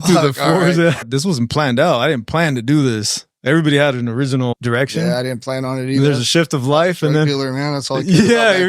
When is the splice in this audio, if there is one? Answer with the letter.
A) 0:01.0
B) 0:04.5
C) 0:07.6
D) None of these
A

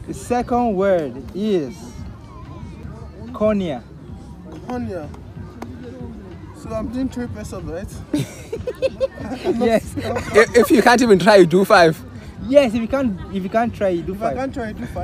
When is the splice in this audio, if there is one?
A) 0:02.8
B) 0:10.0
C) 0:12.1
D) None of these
A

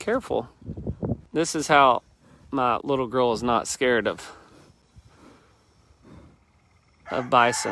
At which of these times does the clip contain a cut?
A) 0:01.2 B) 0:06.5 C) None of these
A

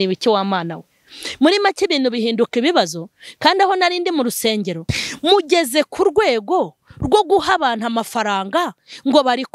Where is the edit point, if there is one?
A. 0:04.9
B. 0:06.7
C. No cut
A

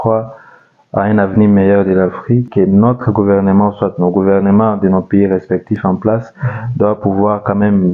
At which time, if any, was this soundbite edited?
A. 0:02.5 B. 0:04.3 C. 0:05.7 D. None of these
A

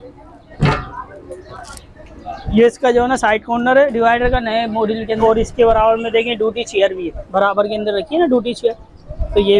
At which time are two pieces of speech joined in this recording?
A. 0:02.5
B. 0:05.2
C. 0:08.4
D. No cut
B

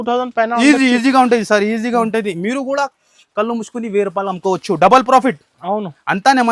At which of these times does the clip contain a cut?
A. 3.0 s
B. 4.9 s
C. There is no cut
C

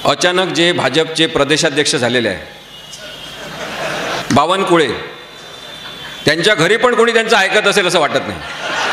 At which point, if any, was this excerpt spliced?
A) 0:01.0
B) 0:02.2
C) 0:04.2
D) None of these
C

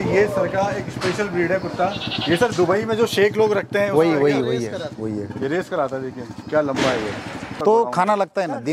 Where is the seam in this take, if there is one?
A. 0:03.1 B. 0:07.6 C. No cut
B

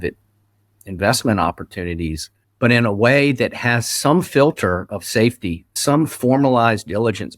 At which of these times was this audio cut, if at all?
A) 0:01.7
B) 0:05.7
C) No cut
B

